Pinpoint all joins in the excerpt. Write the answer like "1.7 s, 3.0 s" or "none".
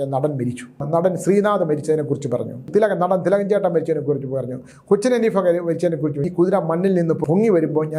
0.8 s, 2.6 s, 6.2 s, 7.2 s